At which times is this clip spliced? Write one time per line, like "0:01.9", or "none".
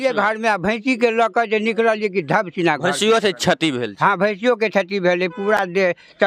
none